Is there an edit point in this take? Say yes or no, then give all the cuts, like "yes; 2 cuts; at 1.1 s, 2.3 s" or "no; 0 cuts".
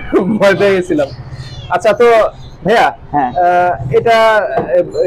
no; 0 cuts